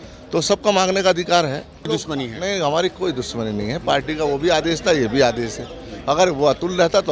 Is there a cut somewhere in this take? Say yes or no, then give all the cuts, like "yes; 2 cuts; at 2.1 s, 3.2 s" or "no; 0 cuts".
yes; 1 cut; at 1.9 s